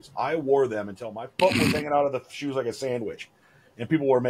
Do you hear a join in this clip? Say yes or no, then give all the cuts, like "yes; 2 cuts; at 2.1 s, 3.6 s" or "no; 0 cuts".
yes; 1 cut; at 1.2 s